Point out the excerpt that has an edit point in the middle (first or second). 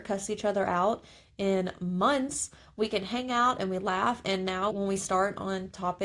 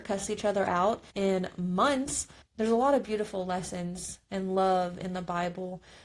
second